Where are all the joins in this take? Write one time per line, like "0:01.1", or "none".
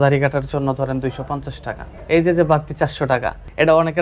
none